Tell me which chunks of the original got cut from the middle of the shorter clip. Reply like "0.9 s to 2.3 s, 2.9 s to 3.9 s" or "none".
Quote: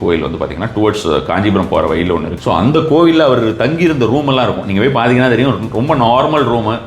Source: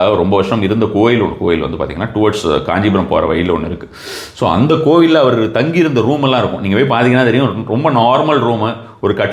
3.7 s to 4.3 s